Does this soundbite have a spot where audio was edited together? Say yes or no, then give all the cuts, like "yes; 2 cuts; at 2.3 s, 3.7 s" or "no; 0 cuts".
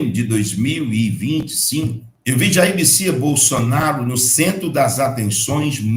yes; 1 cut; at 2.1 s